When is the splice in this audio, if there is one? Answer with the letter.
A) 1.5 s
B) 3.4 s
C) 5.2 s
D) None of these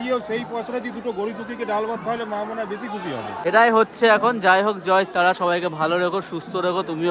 B